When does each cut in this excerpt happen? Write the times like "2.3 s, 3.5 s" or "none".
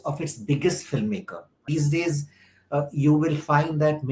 1.6 s